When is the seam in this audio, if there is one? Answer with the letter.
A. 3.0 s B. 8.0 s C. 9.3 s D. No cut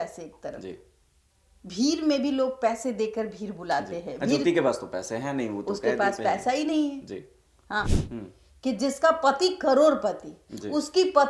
B